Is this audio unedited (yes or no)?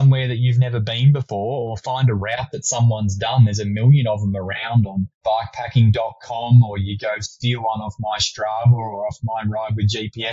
yes